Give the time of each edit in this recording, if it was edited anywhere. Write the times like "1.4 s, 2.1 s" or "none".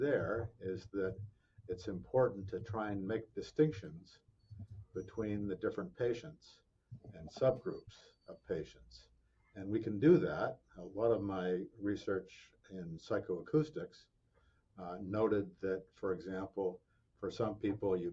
none